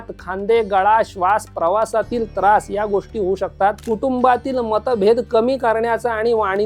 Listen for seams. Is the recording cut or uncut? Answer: cut